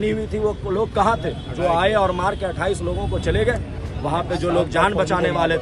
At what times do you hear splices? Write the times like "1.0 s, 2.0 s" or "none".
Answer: none